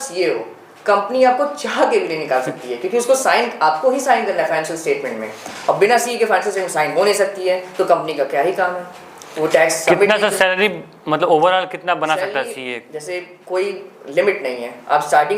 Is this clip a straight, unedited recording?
yes; 0 cuts

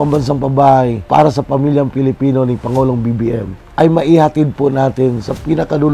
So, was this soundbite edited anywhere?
yes; 2 cuts; at 1.0 s, 3.6 s

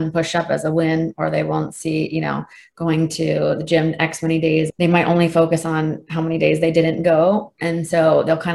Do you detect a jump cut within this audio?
yes; 1 cut; at 4.7 s

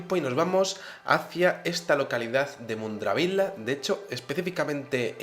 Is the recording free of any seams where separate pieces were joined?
no; 1 cut; at 1.8 s

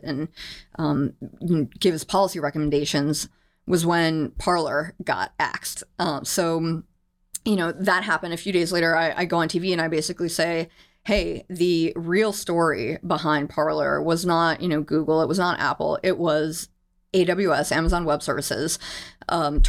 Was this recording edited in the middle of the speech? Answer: no; 0 cuts

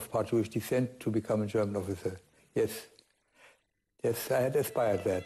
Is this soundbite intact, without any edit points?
yes; 0 cuts

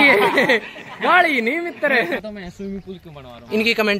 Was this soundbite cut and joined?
yes; 1 cut; at 2.7 s

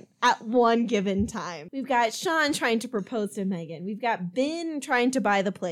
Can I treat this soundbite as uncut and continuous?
yes; 0 cuts

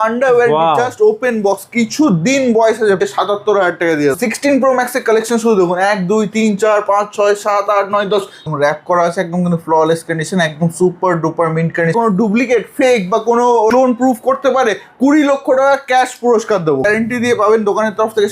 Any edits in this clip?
yes; 6 cuts; at 3.0 s, 4.2 s, 8.4 s, 11.9 s, 13.7 s, 16.8 s

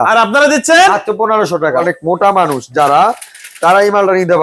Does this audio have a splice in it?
yes; 1 cut; at 1.6 s

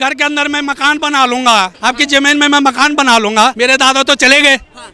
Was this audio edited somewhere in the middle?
yes; 2 cuts; at 1.7 s, 3.5 s

